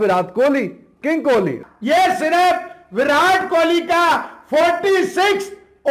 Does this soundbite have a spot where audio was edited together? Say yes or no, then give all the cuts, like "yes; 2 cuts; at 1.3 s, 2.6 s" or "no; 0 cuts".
yes; 1 cut; at 1.6 s